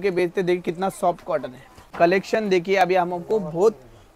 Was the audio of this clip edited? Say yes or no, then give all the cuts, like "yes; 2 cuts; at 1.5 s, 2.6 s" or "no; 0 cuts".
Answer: yes; 1 cut; at 1.9 s